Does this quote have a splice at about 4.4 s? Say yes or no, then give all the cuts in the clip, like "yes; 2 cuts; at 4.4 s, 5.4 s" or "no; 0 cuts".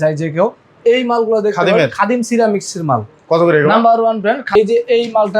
yes; 1 cut; at 4.4 s